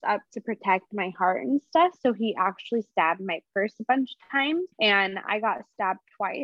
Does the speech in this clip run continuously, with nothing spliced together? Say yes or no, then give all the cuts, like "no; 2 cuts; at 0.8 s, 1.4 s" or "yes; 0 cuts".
no; 1 cut; at 4.7 s